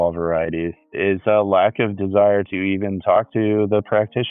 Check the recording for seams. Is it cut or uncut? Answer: cut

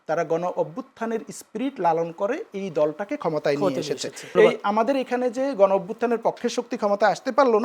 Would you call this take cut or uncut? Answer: cut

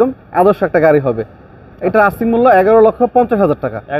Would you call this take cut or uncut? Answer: uncut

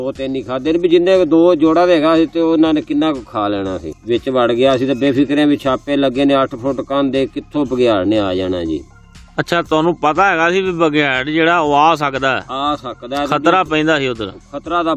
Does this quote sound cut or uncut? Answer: cut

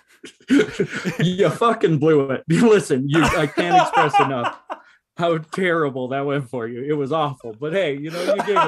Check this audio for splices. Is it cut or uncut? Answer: uncut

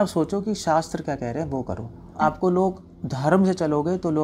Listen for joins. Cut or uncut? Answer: cut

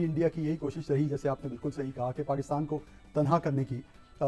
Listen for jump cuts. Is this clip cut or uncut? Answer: uncut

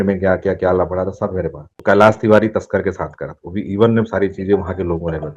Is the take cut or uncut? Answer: cut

